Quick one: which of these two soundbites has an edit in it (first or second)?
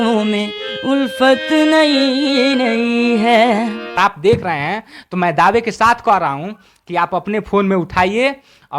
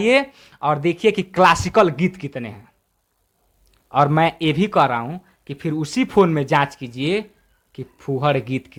first